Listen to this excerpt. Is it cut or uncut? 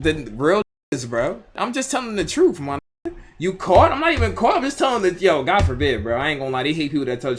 cut